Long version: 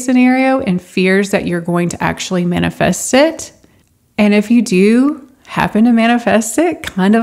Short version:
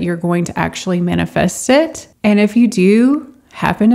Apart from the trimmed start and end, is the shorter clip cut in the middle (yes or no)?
yes